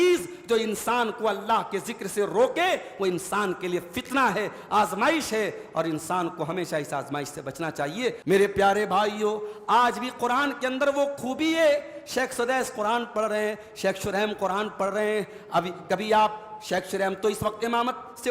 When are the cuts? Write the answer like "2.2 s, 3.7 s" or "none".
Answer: 8.2 s